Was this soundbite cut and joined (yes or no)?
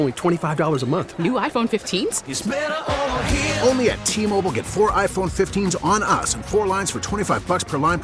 no